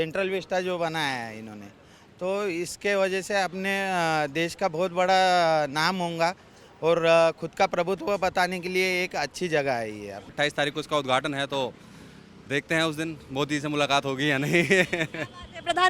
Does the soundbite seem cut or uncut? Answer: cut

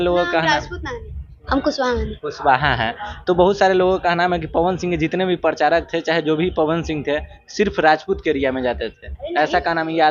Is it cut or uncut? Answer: uncut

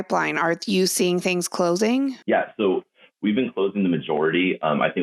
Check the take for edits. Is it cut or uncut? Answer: cut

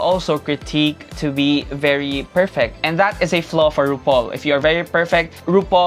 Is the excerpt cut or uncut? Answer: uncut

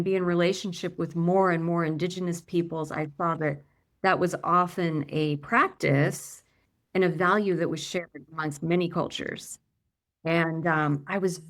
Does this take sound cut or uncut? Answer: uncut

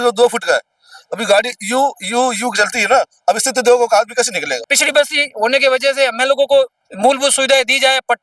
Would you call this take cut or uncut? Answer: cut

